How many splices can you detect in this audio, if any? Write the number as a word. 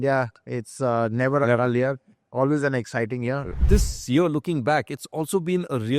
one